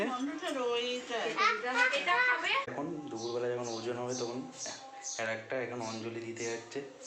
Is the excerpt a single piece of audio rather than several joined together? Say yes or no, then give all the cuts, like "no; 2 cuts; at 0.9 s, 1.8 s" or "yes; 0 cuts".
no; 1 cut; at 2.7 s